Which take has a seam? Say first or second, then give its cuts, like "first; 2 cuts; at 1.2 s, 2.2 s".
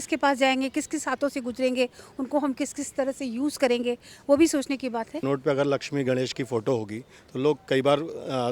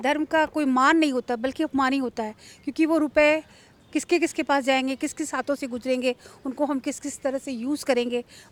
first; 1 cut; at 5.2 s